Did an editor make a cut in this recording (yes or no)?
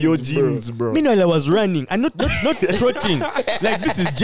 no